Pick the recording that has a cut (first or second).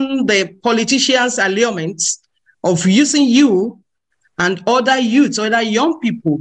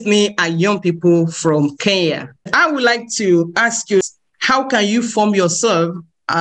second